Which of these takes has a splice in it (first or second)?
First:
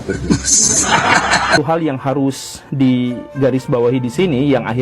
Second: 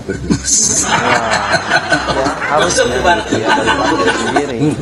first